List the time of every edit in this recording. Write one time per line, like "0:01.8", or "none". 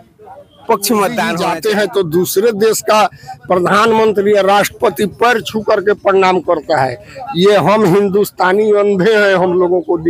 0:01.4